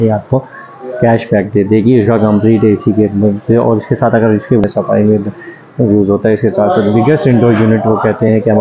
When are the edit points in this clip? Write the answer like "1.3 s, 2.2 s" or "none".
4.6 s